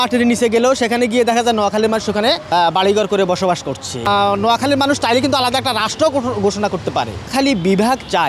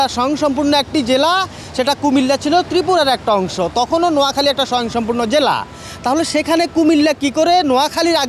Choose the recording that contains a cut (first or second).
first